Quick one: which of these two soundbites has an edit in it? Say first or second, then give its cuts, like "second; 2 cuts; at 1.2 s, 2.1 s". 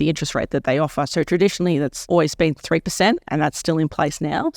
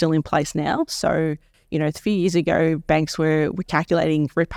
first; 1 cut; at 2.0 s